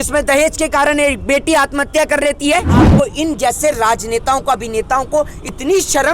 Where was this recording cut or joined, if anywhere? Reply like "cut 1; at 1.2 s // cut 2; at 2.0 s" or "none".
cut 1; at 2.9 s